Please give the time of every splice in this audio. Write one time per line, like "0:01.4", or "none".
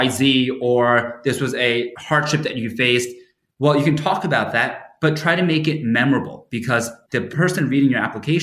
0:02.0
0:07.1